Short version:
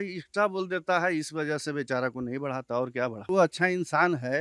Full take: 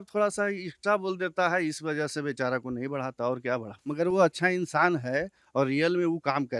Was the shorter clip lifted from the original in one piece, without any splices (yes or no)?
no